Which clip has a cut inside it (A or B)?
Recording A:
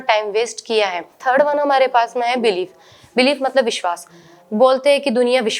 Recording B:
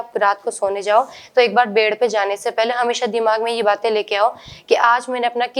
A